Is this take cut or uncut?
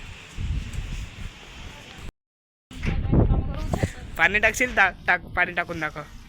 cut